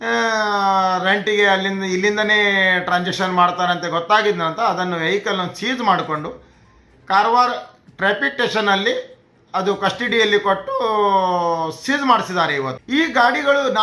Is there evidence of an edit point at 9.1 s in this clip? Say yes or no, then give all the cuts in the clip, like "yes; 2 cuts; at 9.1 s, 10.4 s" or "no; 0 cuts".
no; 1 cut; at 12.8 s